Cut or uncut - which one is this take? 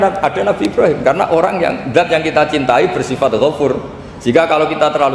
uncut